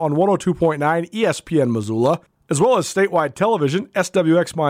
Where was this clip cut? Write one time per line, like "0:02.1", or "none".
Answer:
0:02.4